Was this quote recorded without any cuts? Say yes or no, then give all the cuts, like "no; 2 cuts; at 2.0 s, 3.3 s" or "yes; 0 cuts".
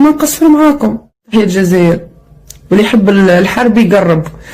no; 1 cut; at 1.3 s